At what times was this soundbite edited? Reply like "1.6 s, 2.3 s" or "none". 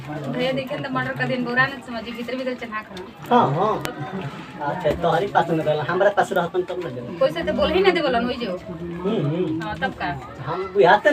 none